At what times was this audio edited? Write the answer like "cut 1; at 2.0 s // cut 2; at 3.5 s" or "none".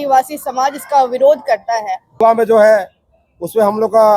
cut 1; at 2.2 s